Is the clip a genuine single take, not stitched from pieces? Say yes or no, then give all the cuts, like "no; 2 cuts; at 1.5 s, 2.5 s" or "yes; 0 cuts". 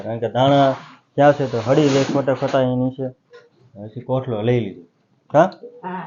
yes; 0 cuts